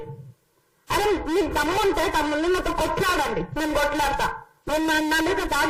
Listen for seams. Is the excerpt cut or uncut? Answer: uncut